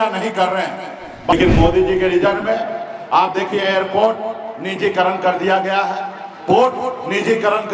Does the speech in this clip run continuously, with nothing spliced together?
no; 1 cut; at 1.3 s

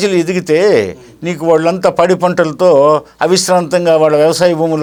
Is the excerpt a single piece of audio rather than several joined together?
yes; 0 cuts

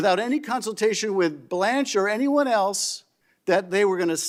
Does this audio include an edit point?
no; 0 cuts

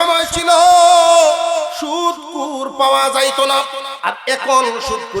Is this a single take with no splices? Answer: no; 2 cuts; at 1.7 s, 3.9 s

